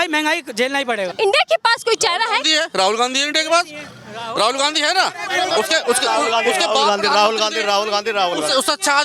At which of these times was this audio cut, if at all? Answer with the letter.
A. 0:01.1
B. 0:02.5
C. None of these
A